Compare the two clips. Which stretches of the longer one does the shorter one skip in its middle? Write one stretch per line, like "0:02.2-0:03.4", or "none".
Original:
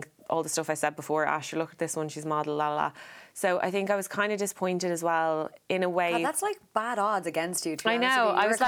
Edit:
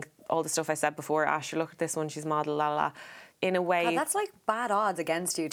0:03.3-0:05.5